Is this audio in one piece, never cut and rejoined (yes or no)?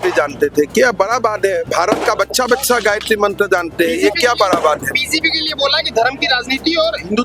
yes